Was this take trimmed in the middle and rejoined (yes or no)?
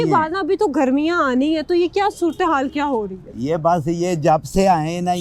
no